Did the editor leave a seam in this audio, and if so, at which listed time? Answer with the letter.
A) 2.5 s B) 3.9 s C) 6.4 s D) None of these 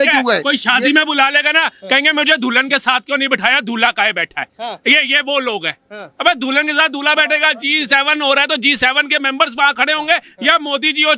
D